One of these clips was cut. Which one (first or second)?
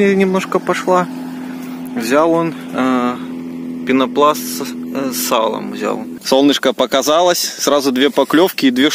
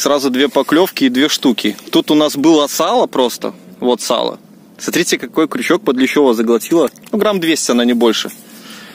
first